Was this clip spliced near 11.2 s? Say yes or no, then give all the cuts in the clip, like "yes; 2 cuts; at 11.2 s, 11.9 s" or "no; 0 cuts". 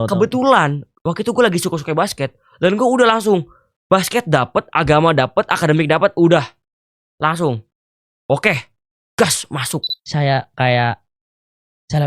no; 1 cut; at 9.9 s